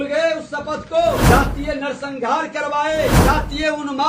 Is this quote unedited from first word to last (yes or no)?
no